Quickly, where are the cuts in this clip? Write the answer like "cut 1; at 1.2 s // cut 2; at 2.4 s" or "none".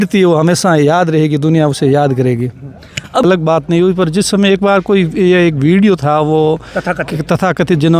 cut 1; at 3.2 s